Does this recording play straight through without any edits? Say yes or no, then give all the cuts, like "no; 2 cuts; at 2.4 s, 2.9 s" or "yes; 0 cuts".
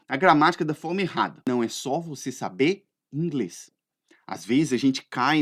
no; 1 cut; at 1.5 s